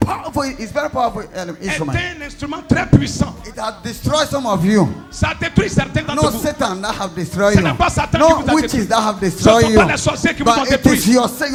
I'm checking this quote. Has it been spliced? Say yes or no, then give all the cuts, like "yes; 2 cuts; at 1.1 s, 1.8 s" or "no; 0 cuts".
no; 0 cuts